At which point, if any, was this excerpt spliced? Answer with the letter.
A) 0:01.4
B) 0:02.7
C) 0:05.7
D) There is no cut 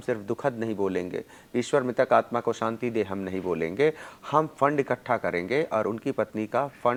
D